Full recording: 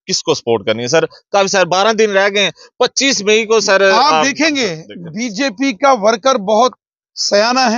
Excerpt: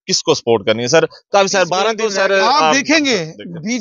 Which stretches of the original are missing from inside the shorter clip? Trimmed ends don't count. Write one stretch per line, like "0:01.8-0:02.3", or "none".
0:02.0-0:03.5